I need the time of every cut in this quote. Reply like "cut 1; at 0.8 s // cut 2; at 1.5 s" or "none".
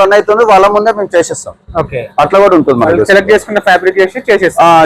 none